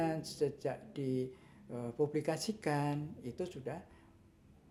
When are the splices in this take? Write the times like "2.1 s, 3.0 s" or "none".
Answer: none